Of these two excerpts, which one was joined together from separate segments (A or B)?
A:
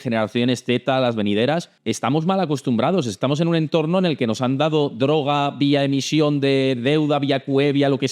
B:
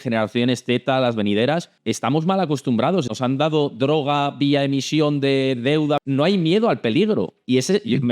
B